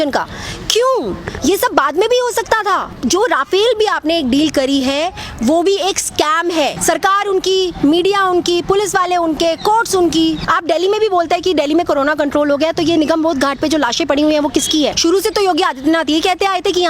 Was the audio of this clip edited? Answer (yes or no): yes